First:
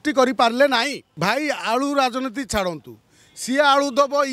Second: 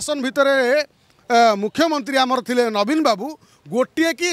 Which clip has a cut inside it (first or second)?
first